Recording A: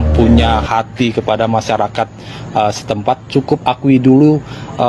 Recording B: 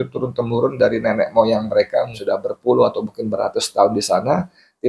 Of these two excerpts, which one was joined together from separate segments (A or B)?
B